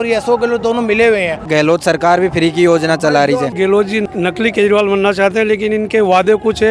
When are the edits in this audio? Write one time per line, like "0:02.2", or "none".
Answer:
0:01.4
0:04.0